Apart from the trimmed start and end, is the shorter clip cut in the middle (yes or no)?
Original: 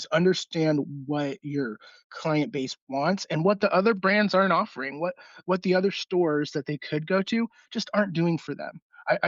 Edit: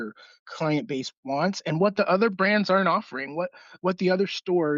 no